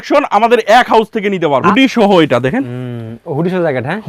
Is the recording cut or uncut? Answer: cut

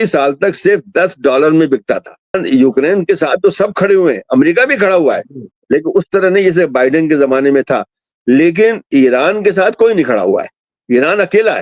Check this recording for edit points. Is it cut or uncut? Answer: cut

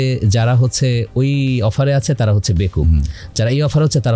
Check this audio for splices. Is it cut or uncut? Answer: uncut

